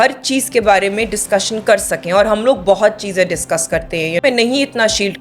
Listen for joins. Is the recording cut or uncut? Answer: cut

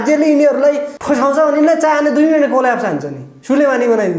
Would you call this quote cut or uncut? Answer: cut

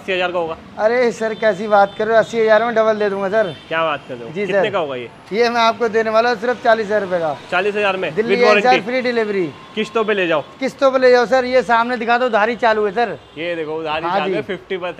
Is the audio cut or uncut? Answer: uncut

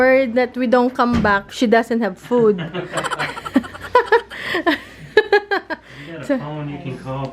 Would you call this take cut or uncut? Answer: cut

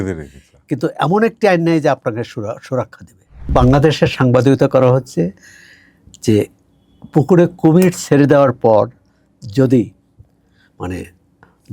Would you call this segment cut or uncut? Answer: cut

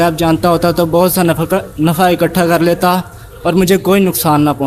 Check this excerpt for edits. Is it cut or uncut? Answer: uncut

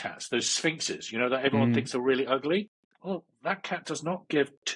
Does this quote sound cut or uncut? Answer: cut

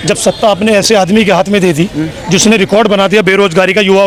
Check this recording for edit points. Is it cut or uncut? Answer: uncut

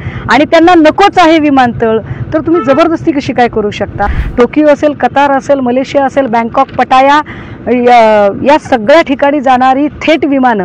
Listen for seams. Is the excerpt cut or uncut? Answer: cut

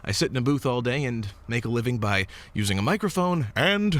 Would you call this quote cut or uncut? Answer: uncut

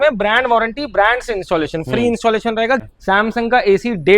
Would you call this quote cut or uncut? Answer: cut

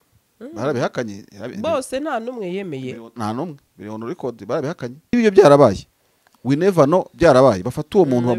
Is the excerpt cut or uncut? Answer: cut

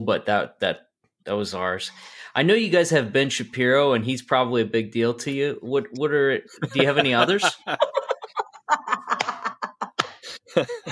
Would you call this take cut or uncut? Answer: uncut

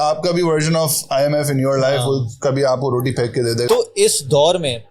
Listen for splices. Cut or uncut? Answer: cut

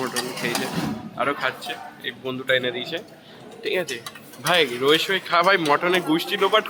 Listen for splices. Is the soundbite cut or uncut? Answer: uncut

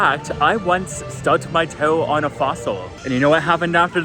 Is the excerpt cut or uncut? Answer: cut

